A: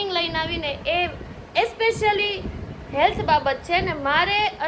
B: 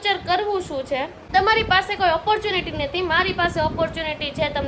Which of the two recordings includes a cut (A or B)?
B